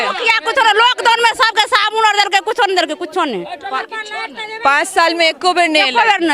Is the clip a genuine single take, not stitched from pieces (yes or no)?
yes